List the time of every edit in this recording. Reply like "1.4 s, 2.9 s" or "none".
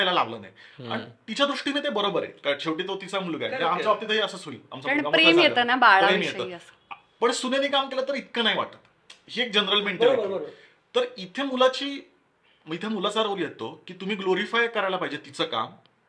none